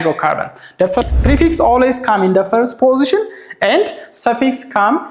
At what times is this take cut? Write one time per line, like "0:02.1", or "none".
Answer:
0:01.0